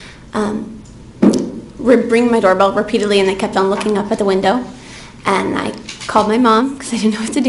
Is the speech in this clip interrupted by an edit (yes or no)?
no